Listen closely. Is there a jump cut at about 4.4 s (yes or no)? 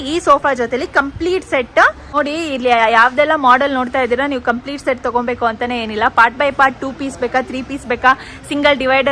no